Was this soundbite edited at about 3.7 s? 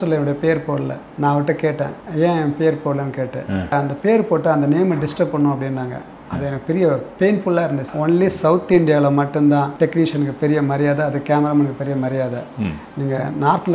yes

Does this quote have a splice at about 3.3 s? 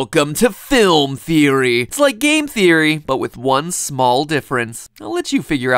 yes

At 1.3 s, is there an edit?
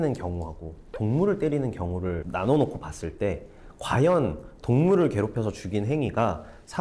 no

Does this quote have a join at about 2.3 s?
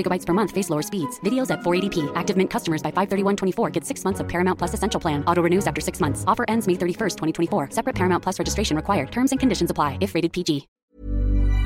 no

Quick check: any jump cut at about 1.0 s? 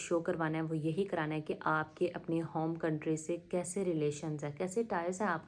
no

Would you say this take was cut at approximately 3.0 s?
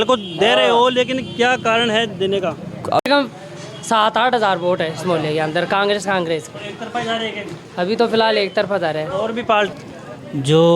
yes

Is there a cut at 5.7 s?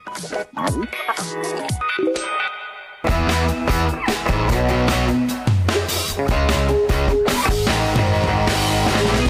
no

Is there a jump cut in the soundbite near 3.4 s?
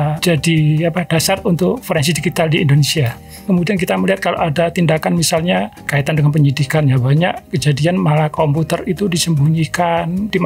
yes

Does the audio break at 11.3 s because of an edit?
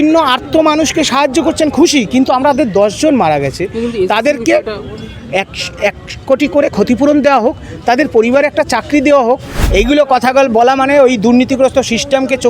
no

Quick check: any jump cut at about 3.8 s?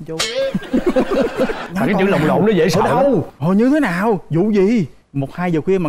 no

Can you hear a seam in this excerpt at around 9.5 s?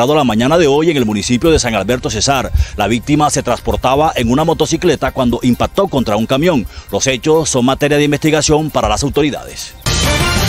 yes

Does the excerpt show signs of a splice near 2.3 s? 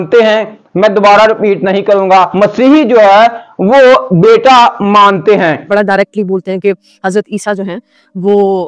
yes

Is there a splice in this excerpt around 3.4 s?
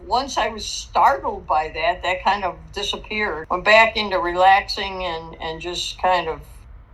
yes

